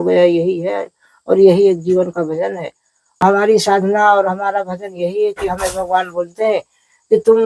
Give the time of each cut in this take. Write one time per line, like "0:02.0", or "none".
0:03.2